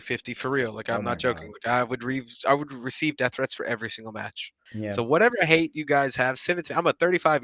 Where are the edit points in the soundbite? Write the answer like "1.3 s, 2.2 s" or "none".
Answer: 4.7 s